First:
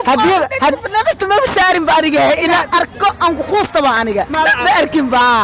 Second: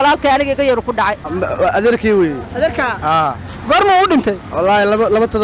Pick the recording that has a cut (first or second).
second